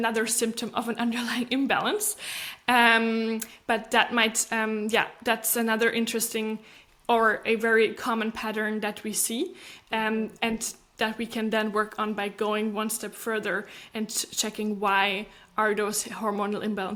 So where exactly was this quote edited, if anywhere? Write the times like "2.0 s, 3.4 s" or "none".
none